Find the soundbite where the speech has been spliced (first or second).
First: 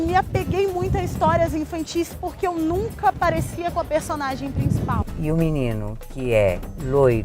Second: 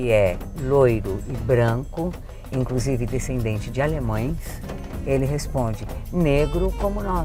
first